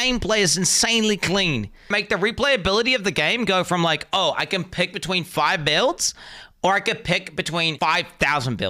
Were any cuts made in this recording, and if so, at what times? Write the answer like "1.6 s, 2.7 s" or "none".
1.9 s, 7.7 s